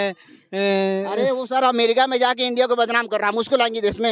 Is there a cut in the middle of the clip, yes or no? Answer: no